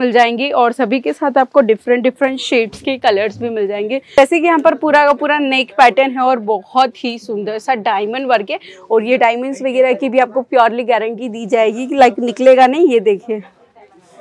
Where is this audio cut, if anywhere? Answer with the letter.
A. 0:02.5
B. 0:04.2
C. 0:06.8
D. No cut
B